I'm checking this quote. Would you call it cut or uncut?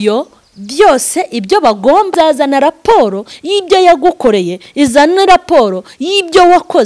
cut